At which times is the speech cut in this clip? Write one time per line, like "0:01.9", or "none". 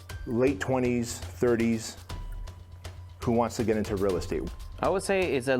0:04.4